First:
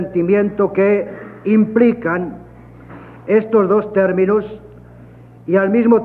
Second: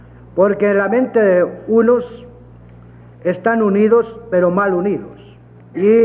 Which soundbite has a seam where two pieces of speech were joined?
second; 1 cut; at 3.6 s

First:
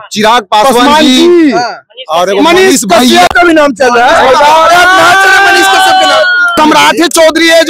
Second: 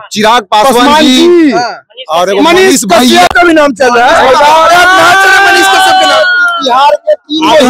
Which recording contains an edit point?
first; 1 cut; at 6.6 s

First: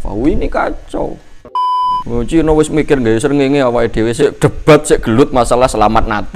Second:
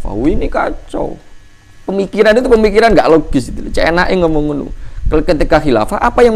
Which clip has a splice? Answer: first; 2 cuts; at 1.8 s, 4.2 s

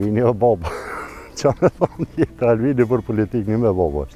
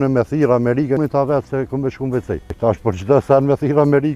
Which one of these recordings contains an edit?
second; 2 cuts; at 1.0 s, 2.5 s

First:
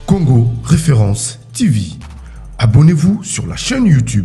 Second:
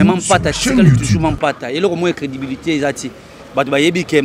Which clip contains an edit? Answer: second; 1 cut; at 1.2 s

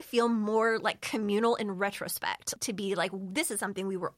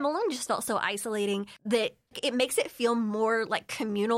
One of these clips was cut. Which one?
first; 1 cut; at 2.5 s

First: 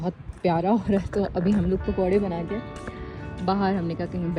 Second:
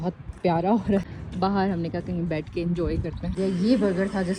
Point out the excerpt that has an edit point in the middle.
second; 2 cuts; at 1.1 s, 3.3 s

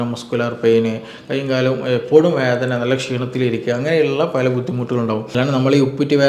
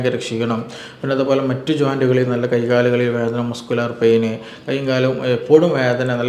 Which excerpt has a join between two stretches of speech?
first; 1 cut; at 5.3 s

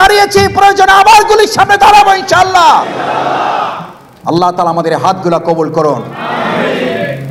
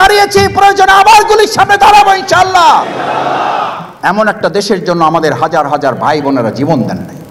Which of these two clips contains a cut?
second; 1 cut; at 3.8 s

